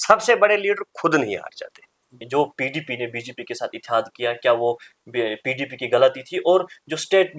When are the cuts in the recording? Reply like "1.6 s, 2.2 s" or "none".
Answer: 2.2 s